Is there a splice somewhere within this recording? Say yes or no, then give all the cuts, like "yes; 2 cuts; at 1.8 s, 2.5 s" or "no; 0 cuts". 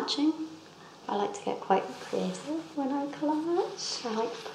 no; 0 cuts